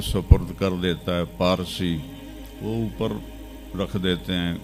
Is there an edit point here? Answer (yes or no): no